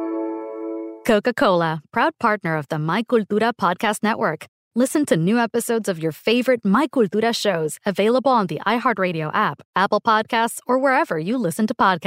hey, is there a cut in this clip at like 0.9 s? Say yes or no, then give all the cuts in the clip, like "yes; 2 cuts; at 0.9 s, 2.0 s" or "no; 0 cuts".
yes; 1 cut; at 0.9 s